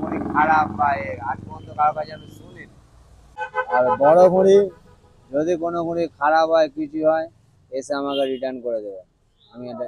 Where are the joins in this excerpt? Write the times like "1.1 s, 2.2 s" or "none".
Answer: 3.3 s